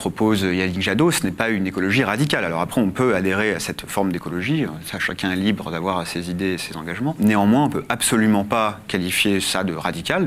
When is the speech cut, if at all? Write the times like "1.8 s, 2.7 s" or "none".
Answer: 7.2 s